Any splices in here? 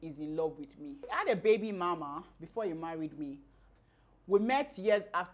yes; 2 cuts; at 1.0 s, 3.7 s

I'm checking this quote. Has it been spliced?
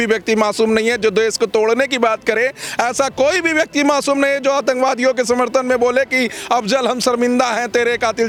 no; 0 cuts

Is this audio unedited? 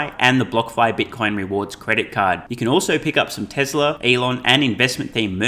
no; 1 cut; at 4.0 s

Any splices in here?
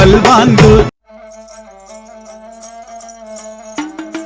yes; 1 cut; at 1.0 s

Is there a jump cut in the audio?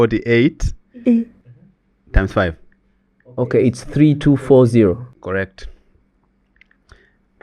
yes; 1 cut; at 5.1 s

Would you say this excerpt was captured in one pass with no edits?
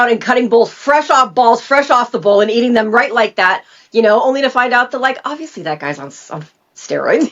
yes; 0 cuts

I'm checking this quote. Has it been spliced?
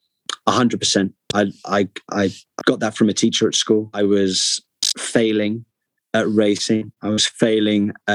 yes; 1 cut; at 3.9 s

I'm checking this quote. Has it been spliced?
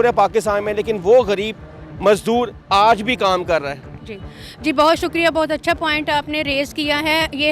no; 0 cuts

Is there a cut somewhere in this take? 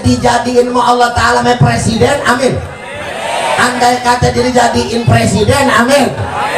yes; 1 cut; at 1.4 s

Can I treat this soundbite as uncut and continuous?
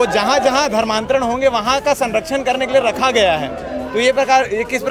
yes; 0 cuts

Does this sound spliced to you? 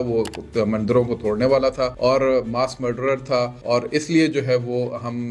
yes; 2 cuts; at 1.9 s, 3.6 s

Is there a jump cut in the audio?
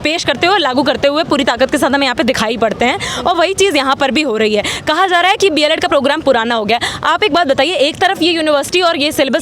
no; 0 cuts

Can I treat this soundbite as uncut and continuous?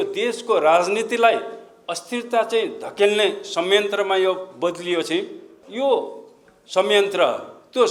no; 1 cut; at 5.6 s

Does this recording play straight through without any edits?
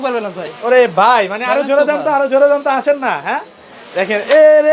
yes; 0 cuts

